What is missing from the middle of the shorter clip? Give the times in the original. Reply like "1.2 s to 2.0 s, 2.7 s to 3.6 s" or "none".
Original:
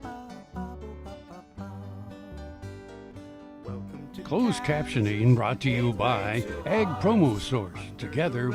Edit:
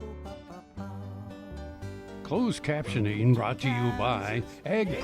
3.1 s to 4.3 s